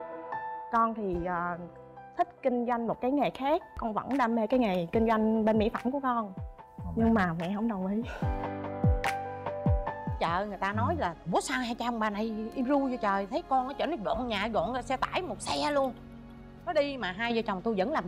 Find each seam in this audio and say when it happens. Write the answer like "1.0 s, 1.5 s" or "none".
3.8 s, 10.2 s